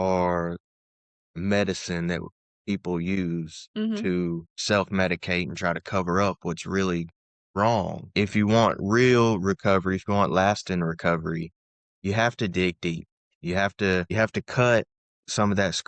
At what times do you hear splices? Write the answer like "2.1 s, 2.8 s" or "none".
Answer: 4.5 s, 8.0 s, 14.1 s